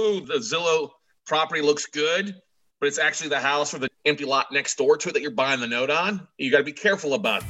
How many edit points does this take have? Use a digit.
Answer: 0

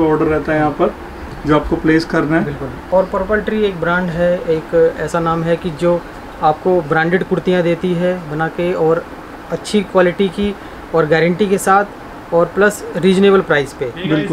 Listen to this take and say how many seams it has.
0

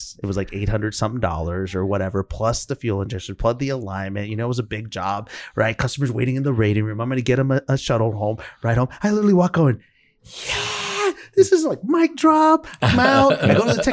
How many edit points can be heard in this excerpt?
0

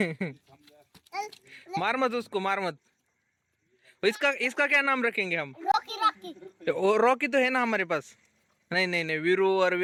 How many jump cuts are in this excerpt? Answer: 0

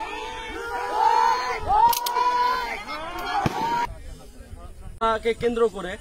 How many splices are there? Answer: 1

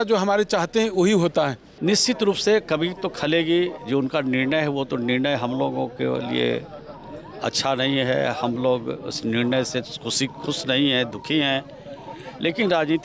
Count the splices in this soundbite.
1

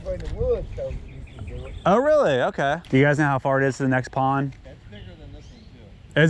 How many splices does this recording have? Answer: 2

